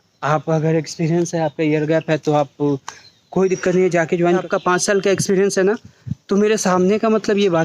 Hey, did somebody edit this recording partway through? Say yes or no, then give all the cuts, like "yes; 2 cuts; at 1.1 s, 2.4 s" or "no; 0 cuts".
yes; 1 cut; at 4.5 s